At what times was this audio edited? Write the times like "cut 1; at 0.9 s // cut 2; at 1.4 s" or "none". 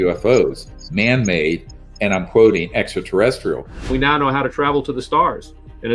cut 1; at 3.9 s